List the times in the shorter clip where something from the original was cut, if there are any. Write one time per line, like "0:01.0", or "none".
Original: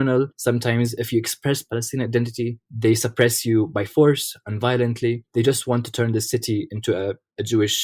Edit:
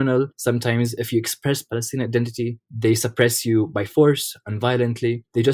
none